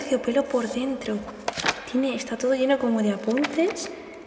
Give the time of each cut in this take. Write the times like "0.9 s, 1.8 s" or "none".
1.4 s

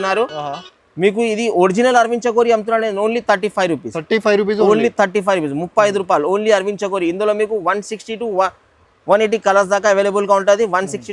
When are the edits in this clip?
none

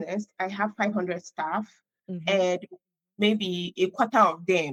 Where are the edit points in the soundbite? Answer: none

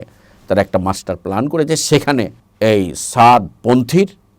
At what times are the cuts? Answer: 2.4 s

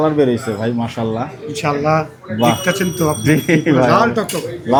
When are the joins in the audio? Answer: none

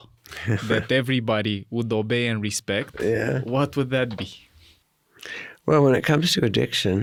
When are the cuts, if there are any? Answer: none

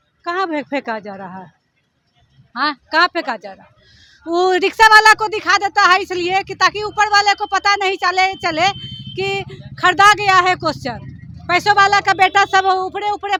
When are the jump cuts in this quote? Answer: none

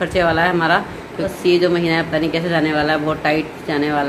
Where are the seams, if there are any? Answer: 1.3 s

